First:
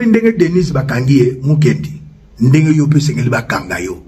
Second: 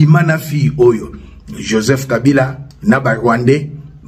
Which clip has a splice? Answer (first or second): second